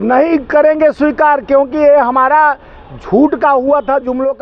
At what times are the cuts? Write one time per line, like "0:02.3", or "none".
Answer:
none